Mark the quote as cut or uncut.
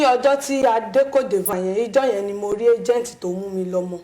cut